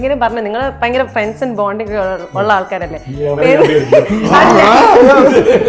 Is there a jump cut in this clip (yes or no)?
no